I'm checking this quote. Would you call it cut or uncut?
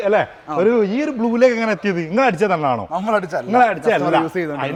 uncut